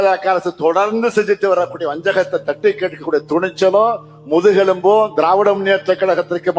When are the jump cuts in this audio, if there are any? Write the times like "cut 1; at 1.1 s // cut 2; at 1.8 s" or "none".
none

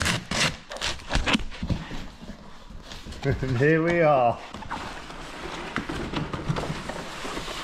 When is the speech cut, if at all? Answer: none

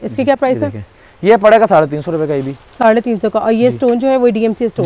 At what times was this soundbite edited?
none

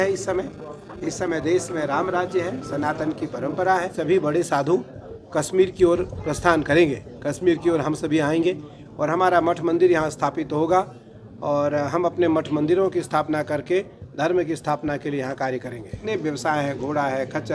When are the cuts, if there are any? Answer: cut 1; at 4.0 s // cut 2; at 16.0 s

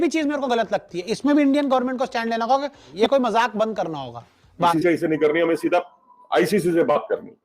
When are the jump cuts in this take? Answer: cut 1; at 2.8 s // cut 2; at 4.7 s

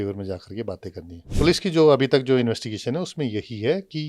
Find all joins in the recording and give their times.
cut 1; at 1.3 s

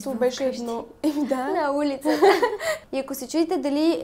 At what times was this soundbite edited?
cut 1; at 2.9 s

